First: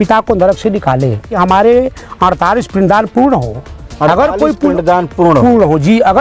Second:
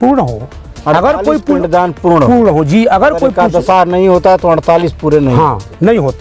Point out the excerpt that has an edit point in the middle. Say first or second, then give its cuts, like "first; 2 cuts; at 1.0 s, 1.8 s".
first; 1 cut; at 1.3 s